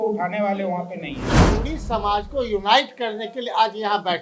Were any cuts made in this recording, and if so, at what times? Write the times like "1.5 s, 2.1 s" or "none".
1.4 s